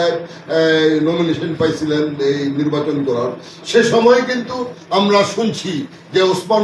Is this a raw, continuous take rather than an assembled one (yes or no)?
yes